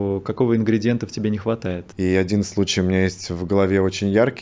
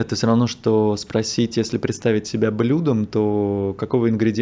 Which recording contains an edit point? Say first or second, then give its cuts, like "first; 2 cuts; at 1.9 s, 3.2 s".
first; 1 cut; at 1.9 s